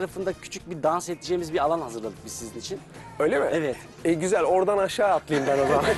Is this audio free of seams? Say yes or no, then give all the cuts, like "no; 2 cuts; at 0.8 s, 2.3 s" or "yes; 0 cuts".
yes; 0 cuts